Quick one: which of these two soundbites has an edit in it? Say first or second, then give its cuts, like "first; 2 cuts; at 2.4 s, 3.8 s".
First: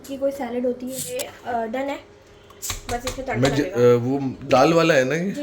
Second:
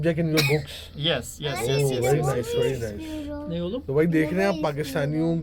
first; 1 cut; at 1.0 s